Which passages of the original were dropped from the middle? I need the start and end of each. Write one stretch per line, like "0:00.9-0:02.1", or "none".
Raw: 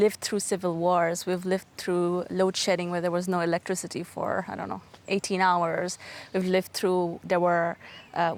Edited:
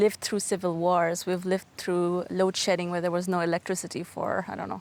none